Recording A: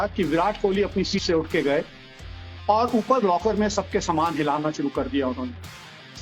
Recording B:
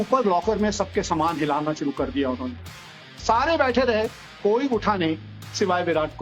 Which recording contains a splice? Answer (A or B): A